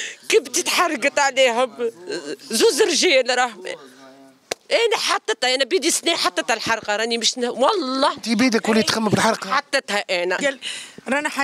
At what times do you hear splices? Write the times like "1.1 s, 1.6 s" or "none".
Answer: 10.4 s